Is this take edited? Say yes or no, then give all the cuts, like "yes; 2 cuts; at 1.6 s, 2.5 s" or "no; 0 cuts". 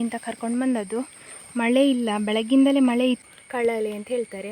yes; 1 cut; at 3.2 s